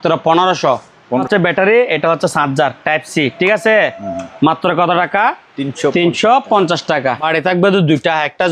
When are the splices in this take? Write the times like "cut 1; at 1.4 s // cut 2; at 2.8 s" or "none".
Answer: cut 1; at 1.3 s // cut 2; at 7.3 s